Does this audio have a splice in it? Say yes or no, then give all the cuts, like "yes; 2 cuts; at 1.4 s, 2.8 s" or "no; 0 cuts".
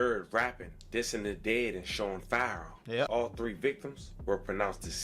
yes; 1 cut; at 3.1 s